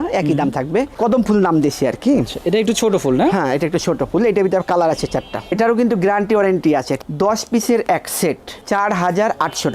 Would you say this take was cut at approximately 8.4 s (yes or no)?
no